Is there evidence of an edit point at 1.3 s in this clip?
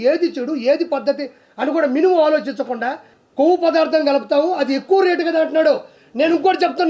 no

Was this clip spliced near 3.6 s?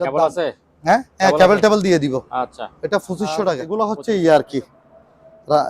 yes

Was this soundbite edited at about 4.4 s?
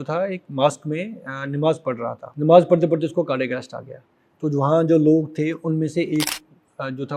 no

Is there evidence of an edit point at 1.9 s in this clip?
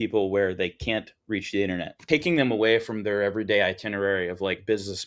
yes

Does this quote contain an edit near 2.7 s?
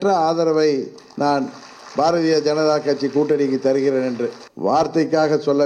no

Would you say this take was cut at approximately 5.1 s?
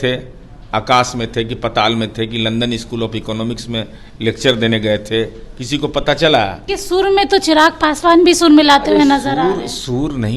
no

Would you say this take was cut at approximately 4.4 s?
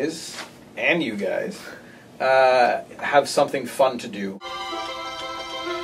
yes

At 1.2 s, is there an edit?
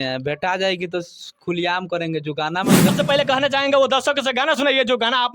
no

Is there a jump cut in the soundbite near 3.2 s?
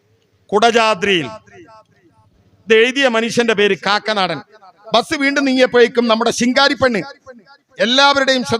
no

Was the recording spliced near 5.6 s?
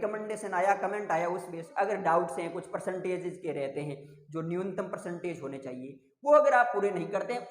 no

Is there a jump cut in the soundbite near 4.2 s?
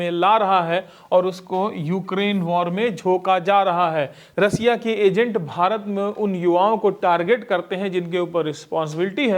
yes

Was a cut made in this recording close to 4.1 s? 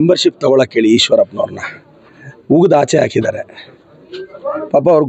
no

